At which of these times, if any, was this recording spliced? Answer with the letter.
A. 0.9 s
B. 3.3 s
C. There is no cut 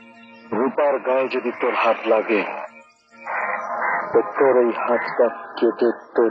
C